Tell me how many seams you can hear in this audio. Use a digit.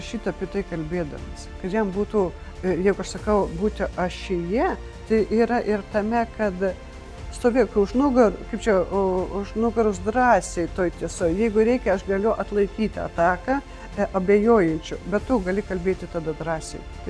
0